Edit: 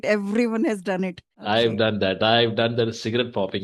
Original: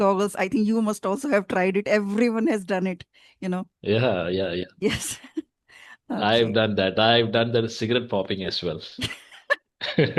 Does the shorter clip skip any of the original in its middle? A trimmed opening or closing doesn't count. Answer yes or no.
yes